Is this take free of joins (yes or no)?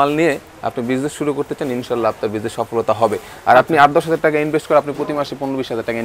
yes